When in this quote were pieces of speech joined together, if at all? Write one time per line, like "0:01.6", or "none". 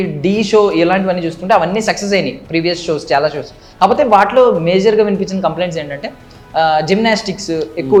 none